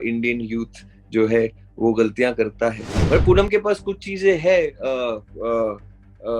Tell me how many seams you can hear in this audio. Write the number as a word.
one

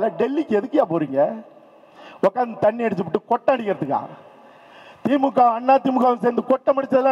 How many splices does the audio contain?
zero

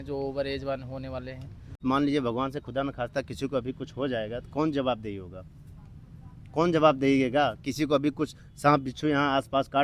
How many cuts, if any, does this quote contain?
one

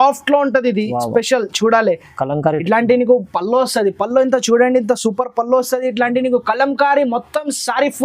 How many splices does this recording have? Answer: zero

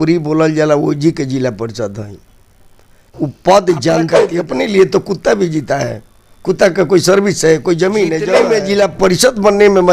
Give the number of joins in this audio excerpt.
three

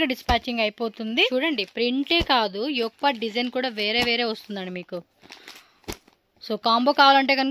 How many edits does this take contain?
one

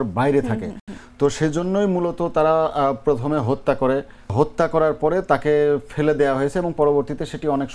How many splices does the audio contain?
one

